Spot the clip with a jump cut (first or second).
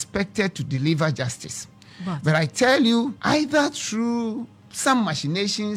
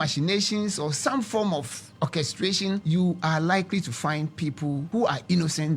second